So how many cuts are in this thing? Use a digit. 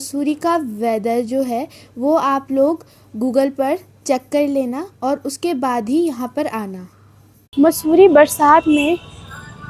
1